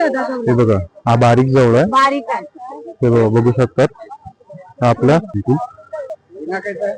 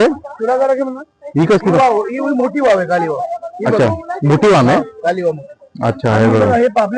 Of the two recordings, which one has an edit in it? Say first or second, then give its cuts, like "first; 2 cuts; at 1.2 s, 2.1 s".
first; 1 cut; at 5.3 s